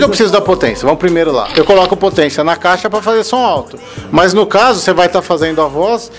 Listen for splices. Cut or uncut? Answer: cut